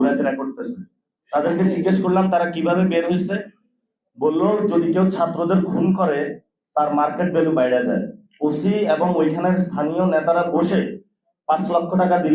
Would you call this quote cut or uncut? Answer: uncut